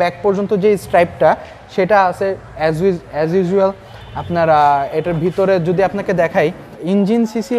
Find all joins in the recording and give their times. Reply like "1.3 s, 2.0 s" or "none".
6.7 s